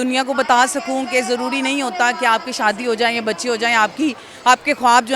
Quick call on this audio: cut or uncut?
uncut